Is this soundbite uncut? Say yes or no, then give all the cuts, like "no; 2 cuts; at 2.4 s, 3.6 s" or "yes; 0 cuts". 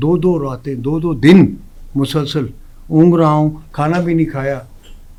yes; 0 cuts